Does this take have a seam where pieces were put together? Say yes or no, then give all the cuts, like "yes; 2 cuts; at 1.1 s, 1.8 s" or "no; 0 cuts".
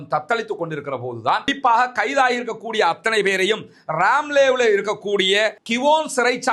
yes; 1 cut; at 1.5 s